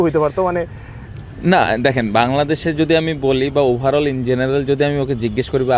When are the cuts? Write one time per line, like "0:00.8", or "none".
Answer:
none